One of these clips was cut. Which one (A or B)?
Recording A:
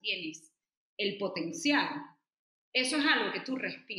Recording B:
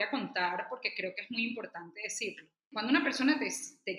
B